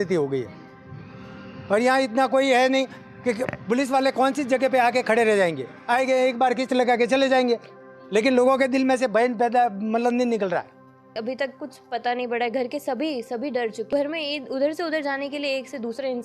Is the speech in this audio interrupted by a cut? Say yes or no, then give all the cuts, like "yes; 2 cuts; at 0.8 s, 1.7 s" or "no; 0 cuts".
yes; 2 cuts; at 11.1 s, 13.9 s